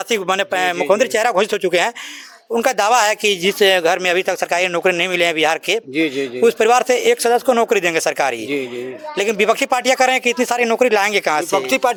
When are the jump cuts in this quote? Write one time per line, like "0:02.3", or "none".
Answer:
none